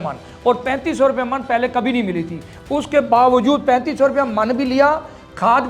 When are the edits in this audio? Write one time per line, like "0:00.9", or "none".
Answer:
none